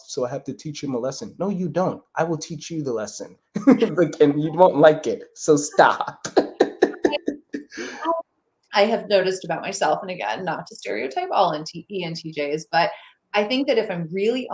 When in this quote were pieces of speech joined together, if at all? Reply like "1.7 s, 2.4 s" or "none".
8.2 s